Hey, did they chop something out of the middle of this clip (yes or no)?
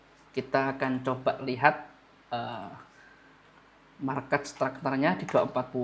no